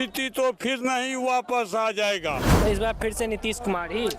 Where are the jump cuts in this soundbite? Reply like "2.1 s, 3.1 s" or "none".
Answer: 2.6 s